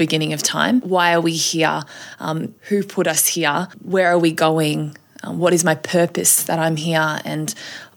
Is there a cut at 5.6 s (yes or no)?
no